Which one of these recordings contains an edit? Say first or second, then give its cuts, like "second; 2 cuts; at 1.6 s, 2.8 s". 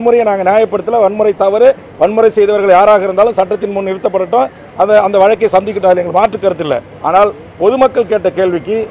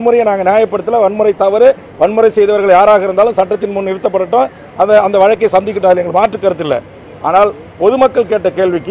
first; 1 cut; at 6.9 s